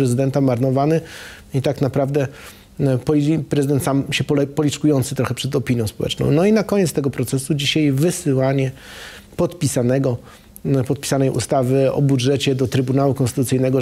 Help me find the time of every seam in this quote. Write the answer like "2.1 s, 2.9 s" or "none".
none